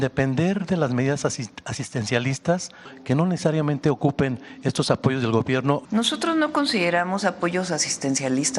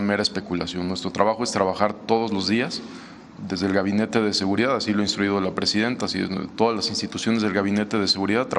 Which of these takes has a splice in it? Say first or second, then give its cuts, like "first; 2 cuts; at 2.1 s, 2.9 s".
first; 2 cuts; at 2.9 s, 5.8 s